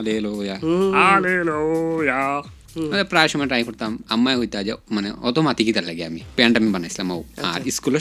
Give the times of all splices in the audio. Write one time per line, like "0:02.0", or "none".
0:02.6
0:06.3